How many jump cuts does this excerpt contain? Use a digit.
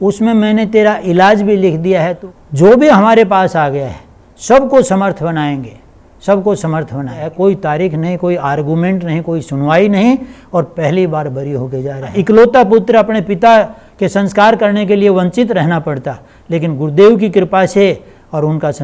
3